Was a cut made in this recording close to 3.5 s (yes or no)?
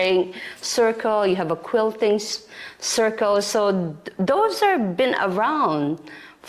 no